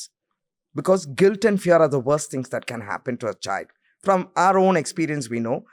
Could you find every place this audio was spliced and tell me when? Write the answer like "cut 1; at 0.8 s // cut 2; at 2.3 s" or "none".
none